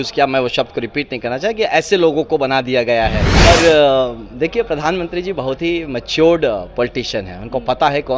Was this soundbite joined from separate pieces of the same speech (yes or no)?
yes